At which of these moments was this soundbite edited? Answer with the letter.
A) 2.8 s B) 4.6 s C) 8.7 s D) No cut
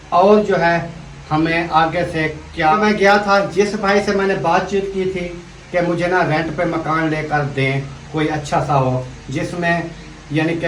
A